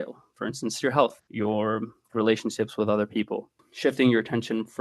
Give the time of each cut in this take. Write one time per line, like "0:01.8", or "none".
0:01.2
0:03.6